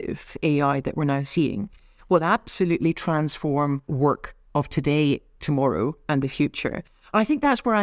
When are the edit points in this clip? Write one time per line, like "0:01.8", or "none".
0:03.9